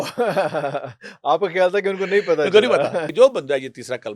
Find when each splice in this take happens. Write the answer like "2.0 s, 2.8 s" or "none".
3.1 s